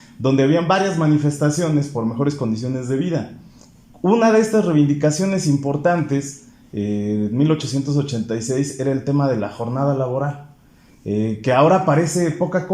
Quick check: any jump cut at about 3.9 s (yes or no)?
no